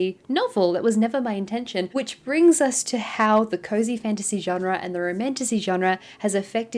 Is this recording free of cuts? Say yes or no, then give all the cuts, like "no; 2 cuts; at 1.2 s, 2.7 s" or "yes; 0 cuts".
yes; 0 cuts